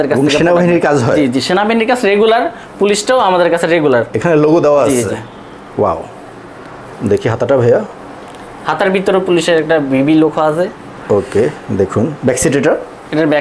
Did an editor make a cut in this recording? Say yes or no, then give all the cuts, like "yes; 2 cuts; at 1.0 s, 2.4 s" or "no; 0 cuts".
no; 0 cuts